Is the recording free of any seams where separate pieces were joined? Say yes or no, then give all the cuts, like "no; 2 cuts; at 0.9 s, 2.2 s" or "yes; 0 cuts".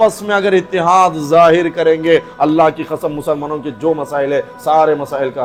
yes; 0 cuts